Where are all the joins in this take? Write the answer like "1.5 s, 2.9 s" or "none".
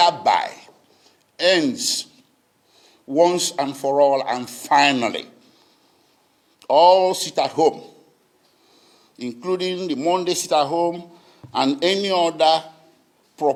none